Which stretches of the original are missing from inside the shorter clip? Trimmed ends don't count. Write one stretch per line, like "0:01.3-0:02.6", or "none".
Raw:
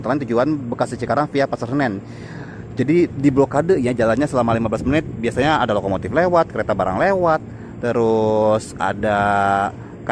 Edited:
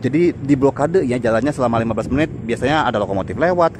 none